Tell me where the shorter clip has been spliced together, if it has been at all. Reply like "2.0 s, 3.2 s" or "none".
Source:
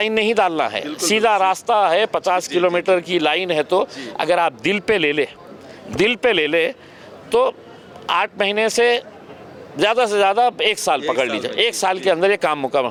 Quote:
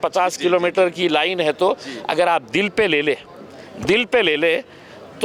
none